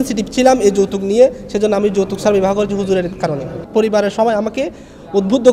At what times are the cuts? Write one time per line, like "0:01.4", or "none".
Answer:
0:03.6